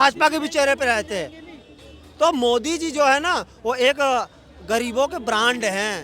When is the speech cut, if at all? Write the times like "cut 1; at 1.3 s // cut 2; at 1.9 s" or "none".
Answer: none